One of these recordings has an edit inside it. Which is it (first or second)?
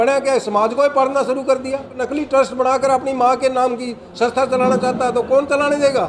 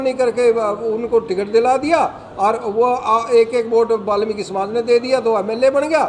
first